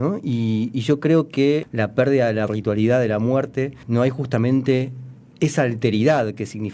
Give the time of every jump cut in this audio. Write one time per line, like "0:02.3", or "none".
0:01.7
0:03.8